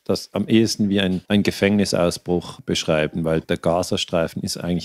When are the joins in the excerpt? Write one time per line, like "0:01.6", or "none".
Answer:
0:01.2
0:02.5
0:03.4